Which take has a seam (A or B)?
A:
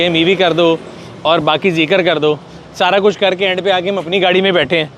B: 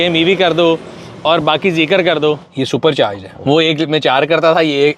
B